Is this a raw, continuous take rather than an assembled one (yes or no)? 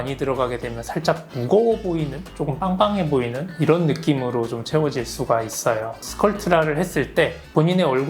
yes